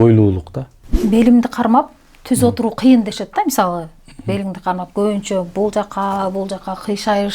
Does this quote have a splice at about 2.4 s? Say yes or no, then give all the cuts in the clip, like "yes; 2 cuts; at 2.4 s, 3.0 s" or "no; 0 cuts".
no; 1 cut; at 1.0 s